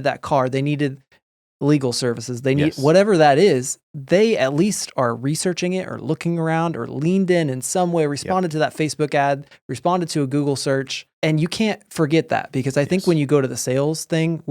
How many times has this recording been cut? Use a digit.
1